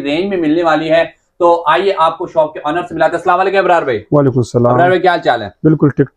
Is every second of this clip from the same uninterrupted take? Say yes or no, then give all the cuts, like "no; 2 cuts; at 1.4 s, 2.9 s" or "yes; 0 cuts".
yes; 0 cuts